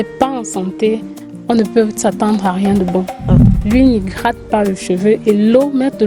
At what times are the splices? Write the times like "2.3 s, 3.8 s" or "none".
3.5 s